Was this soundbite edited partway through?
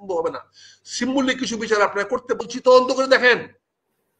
yes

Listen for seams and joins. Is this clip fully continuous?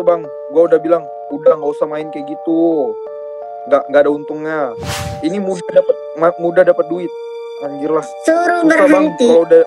no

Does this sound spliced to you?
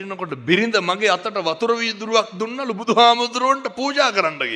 no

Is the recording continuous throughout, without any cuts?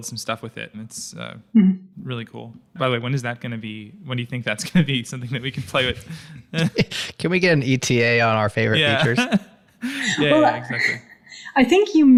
yes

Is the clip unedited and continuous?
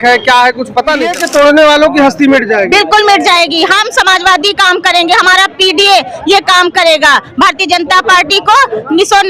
no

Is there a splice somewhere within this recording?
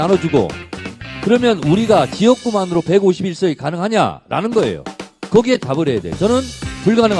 no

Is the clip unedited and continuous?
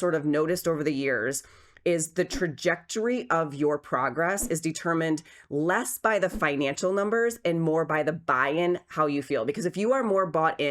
yes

